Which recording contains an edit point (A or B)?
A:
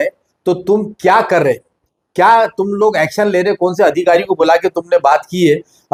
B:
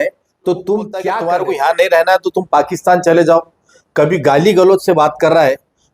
B